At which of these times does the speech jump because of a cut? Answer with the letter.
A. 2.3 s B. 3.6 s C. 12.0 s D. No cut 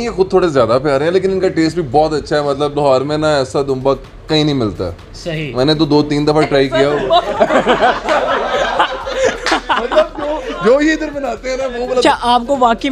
C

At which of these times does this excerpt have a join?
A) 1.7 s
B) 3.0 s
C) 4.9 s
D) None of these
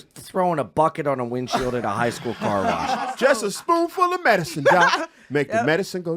B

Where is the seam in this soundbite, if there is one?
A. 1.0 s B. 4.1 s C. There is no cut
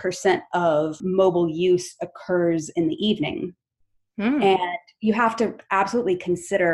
A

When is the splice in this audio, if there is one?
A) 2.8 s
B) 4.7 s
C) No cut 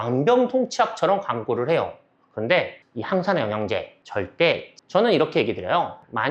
B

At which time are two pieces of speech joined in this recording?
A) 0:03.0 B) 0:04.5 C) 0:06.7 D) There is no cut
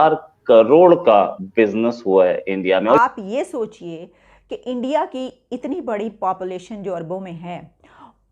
A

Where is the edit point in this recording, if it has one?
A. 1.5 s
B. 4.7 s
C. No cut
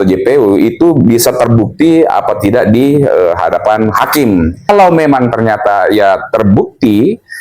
B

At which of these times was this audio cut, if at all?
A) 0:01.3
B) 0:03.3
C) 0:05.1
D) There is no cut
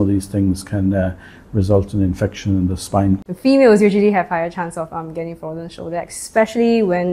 B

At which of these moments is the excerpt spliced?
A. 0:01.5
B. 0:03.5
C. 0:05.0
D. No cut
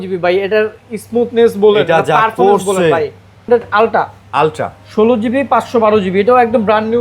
B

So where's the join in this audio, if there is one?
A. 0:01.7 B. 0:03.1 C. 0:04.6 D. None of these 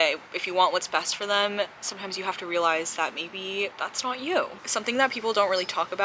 C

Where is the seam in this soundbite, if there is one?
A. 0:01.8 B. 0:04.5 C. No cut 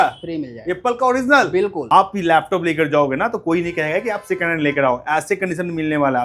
A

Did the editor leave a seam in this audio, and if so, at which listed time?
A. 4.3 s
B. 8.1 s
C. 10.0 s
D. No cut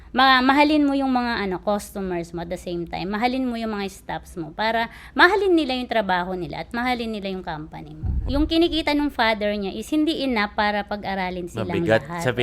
B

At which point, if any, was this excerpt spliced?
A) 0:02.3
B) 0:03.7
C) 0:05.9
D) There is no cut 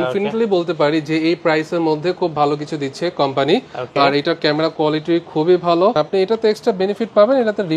C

